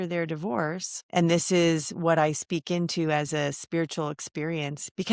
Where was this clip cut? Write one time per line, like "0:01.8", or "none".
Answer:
0:00.9